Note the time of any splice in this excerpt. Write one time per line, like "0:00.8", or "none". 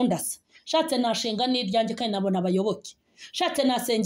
none